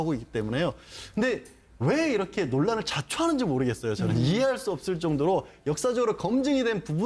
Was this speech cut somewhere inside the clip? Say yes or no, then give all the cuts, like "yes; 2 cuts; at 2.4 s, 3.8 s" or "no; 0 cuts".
yes; 1 cut; at 1.9 s